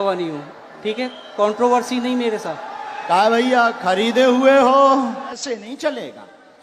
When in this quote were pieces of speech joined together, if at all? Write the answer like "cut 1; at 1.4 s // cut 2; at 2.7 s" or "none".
cut 1; at 5.4 s